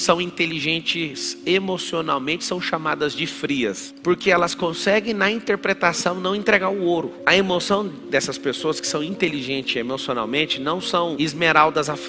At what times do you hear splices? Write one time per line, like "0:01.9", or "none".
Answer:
0:03.9